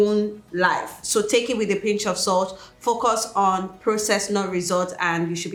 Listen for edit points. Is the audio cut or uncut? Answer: uncut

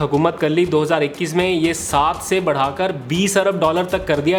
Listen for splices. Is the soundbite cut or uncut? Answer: uncut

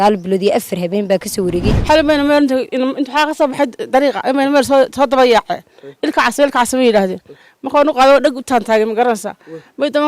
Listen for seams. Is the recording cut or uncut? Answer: cut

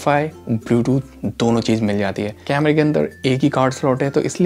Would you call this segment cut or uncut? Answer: cut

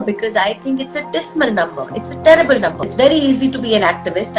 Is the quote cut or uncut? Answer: cut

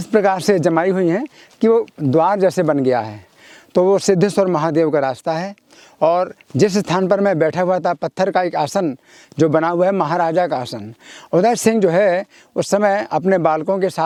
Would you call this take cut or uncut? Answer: uncut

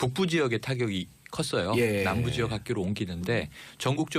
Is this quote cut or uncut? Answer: cut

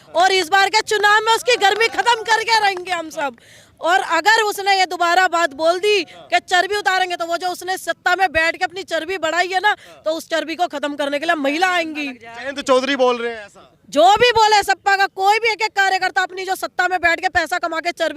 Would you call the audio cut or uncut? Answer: uncut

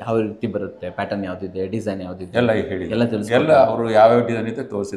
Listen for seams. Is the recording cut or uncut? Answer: uncut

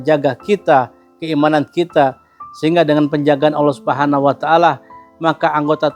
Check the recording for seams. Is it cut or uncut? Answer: uncut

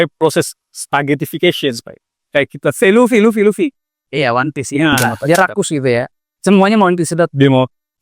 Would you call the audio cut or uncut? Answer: cut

